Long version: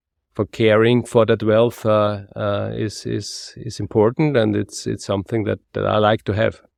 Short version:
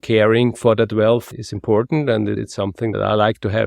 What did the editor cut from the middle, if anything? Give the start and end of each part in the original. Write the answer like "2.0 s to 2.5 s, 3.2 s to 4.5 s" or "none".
1.8 s to 3.5 s, 5.0 s to 5.6 s